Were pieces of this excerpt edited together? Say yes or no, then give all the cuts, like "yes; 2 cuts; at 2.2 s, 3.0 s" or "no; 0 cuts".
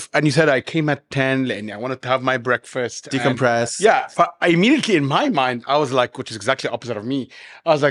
no; 0 cuts